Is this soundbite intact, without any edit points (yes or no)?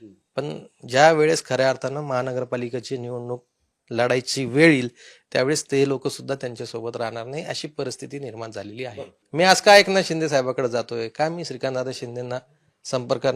no